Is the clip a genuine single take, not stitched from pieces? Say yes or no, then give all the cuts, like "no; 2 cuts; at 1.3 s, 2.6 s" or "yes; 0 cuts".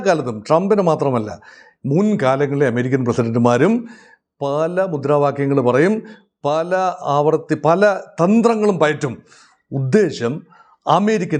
yes; 0 cuts